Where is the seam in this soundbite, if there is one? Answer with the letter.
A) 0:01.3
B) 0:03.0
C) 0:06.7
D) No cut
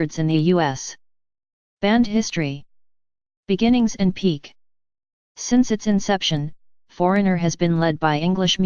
A